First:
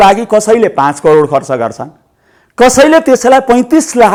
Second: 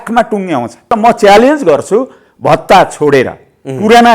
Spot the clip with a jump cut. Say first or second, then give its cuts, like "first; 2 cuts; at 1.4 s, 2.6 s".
second; 1 cut; at 0.9 s